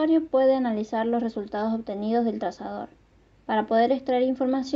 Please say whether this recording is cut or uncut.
uncut